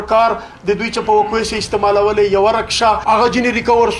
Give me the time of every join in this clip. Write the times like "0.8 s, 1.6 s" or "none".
3.0 s